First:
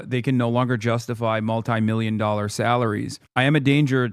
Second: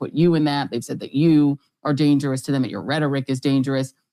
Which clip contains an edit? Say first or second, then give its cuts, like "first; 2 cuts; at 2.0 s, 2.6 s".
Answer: first; 1 cut; at 3.2 s